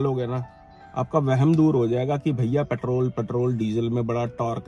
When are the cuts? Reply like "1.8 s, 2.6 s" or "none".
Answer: none